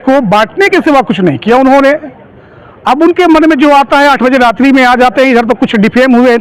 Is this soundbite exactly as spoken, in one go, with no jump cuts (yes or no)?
yes